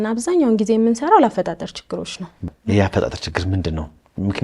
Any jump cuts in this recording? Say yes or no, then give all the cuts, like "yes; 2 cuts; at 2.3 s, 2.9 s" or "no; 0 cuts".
yes; 1 cut; at 2.4 s